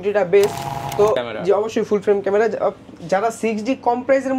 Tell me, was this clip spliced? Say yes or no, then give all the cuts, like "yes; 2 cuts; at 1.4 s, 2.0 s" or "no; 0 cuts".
yes; 1 cut; at 1.2 s